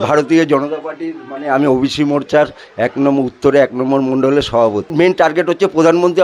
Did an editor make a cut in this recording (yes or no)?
yes